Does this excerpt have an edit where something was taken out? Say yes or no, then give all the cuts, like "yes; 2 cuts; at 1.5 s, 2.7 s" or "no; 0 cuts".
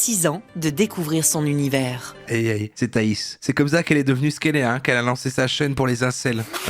no; 0 cuts